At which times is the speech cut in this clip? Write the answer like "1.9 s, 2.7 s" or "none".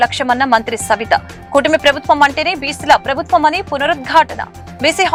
none